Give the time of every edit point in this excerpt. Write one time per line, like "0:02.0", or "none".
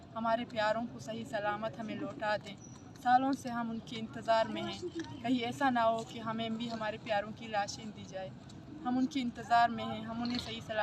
none